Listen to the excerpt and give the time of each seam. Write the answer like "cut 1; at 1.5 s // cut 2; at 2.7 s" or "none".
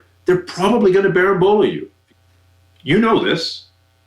cut 1; at 2.0 s